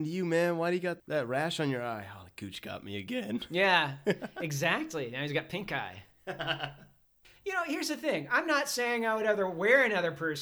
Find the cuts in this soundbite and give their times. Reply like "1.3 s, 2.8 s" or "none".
1.0 s, 7.2 s